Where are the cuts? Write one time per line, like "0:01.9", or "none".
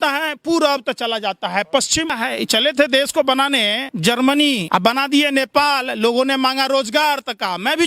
0:02.1
0:03.9
0:04.6